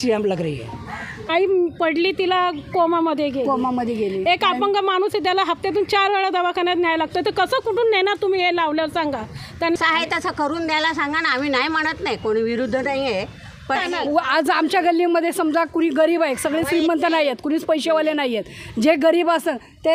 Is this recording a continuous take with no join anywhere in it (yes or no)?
no